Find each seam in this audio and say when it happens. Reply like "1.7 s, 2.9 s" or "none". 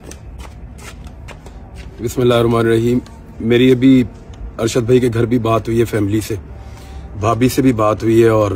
1.3 s

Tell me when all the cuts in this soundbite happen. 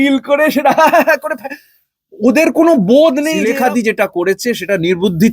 3.4 s

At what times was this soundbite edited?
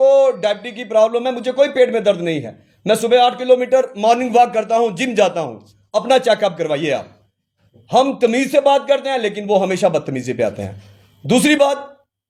none

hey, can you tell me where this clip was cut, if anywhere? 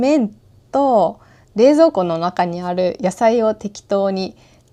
none

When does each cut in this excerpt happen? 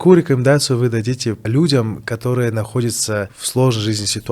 1.5 s, 3.4 s

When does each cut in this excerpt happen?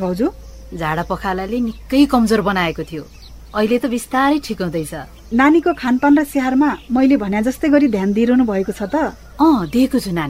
5.2 s, 9.2 s

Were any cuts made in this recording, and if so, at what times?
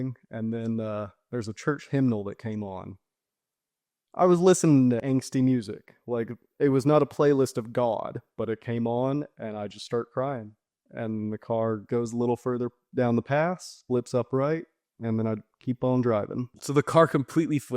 5.0 s, 16.6 s

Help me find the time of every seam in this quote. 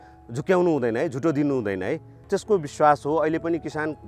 2.2 s

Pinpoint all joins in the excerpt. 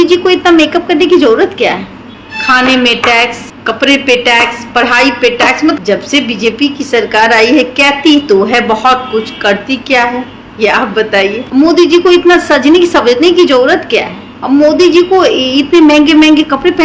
2.0 s, 5.8 s, 11.4 s

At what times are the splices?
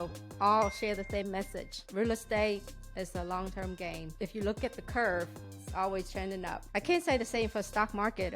1.9 s, 4.1 s, 6.6 s

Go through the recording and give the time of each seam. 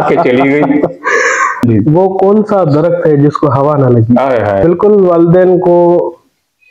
1.6 s, 4.6 s

